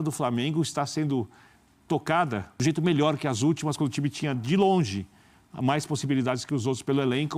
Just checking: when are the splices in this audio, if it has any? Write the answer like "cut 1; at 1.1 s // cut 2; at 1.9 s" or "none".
cut 1; at 2.5 s